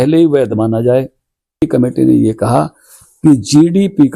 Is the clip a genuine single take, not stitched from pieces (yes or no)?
no